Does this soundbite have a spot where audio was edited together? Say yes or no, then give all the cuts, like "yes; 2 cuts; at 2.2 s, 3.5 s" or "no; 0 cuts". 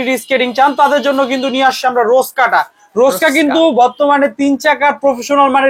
no; 0 cuts